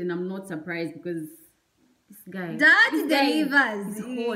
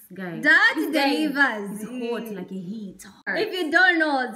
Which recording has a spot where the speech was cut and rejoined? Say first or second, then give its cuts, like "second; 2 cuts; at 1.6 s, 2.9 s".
second; 1 cut; at 3.3 s